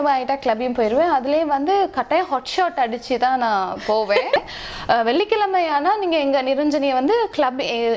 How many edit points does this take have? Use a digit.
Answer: 1